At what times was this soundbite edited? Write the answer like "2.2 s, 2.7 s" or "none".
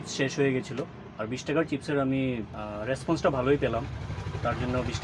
2.6 s